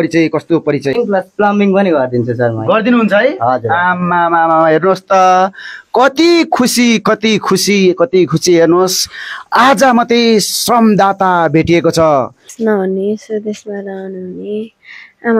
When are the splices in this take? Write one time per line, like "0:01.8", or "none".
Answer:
0:00.9
0:12.5